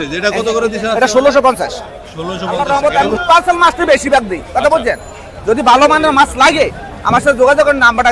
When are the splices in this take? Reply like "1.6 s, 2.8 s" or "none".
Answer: 2.5 s